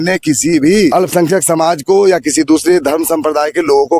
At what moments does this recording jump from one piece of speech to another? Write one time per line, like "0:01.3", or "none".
0:00.9